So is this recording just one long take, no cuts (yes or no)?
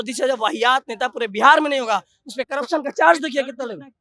yes